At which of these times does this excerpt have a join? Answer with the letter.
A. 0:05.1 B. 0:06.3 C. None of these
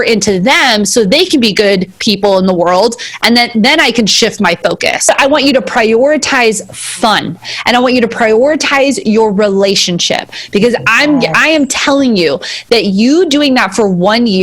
A